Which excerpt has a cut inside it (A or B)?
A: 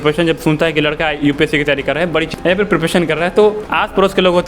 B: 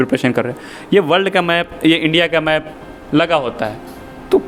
A